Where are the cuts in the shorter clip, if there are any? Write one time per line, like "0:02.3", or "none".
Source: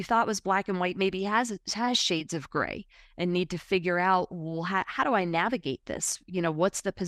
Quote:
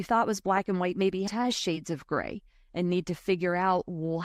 0:01.3